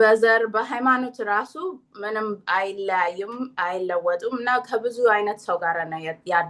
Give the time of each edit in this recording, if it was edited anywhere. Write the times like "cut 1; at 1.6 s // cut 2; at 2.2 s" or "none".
none

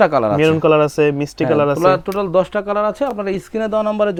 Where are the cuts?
none

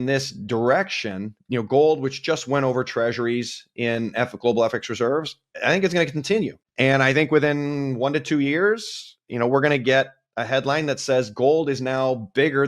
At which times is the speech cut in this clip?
cut 1; at 1.4 s // cut 2; at 6.6 s

